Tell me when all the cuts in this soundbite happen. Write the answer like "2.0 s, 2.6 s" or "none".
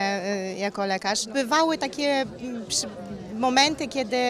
1.3 s